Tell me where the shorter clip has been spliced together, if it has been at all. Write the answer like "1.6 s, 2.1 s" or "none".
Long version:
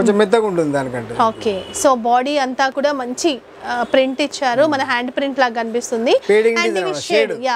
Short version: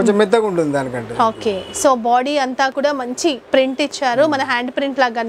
3.4 s